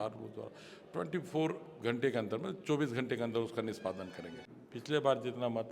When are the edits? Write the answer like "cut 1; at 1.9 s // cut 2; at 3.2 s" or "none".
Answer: cut 1; at 4.4 s